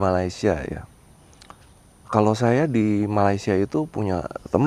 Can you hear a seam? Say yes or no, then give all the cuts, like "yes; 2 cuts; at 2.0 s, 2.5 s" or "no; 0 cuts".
no; 0 cuts